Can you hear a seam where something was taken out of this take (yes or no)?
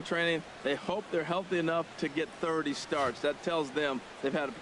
no